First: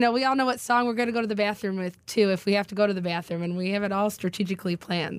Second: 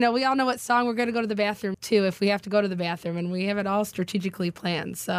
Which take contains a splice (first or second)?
second